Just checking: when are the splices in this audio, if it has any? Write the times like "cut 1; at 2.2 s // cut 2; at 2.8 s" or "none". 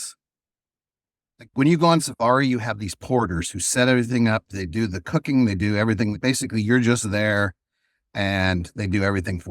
cut 1; at 4.6 s // cut 2; at 6.2 s